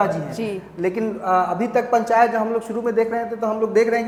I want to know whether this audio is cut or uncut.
uncut